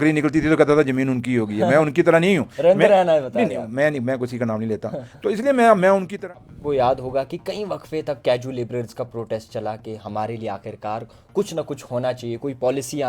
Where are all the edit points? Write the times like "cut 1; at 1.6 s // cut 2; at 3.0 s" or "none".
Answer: cut 1; at 6.2 s